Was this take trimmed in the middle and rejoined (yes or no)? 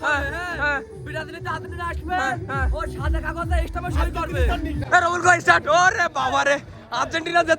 yes